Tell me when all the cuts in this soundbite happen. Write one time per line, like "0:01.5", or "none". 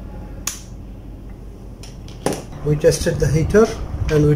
0:02.5